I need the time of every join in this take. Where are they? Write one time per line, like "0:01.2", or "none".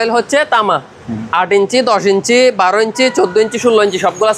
none